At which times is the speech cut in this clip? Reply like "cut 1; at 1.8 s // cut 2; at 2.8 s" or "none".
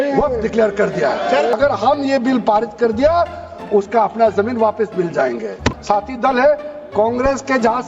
cut 1; at 1.5 s // cut 2; at 5.7 s

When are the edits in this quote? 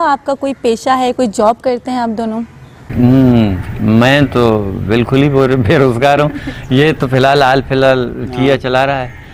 none

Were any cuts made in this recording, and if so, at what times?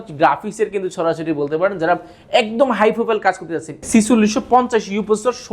cut 1; at 3.7 s

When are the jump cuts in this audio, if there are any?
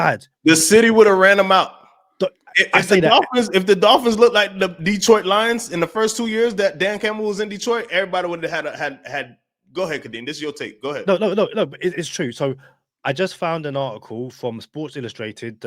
none

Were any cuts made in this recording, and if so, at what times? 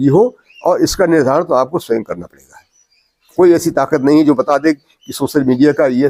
none

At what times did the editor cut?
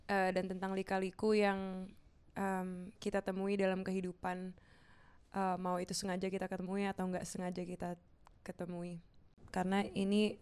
cut 1; at 9.4 s

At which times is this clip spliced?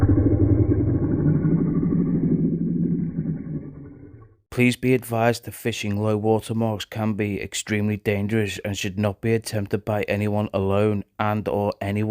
cut 1; at 4.3 s

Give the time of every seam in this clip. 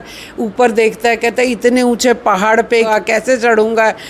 cut 1; at 2.9 s

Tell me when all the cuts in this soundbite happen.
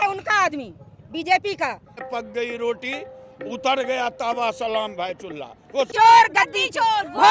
cut 1; at 2.0 s // cut 2; at 5.9 s

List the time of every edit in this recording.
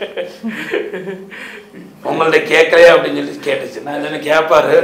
none

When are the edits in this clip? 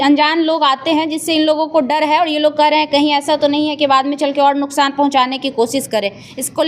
none

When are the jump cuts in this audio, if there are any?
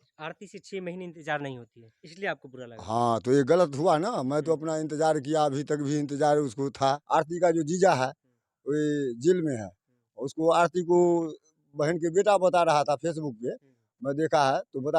cut 1; at 7.0 s

